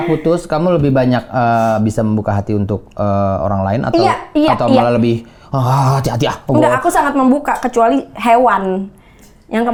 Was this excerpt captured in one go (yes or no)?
yes